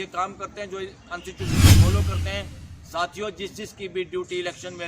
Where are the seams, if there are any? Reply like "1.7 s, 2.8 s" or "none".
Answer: 1.5 s, 2.4 s